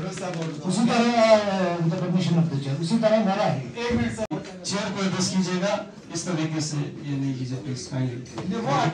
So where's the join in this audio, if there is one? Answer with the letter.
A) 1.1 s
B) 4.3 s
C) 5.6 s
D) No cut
B